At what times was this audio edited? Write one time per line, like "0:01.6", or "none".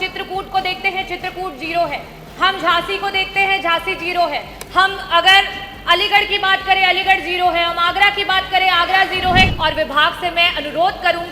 0:09.5